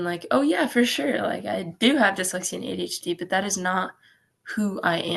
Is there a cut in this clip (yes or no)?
no